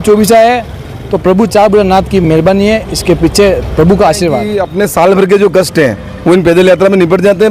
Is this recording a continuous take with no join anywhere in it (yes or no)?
no